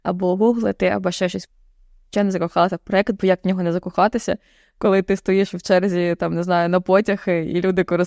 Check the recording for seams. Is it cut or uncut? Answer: cut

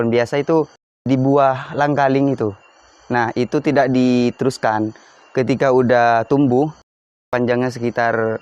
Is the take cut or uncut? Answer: cut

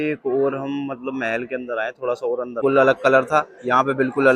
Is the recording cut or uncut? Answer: cut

